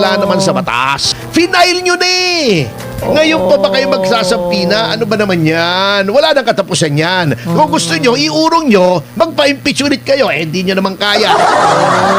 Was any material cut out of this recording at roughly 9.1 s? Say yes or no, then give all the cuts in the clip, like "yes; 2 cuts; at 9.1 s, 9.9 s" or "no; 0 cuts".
no; 1 cut; at 1.2 s